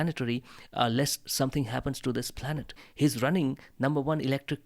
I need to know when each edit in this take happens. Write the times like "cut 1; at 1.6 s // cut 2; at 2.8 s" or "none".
cut 1; at 2.8 s